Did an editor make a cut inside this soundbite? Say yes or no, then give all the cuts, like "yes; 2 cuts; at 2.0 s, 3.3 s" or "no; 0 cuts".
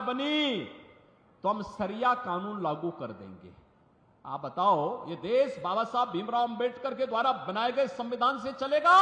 no; 0 cuts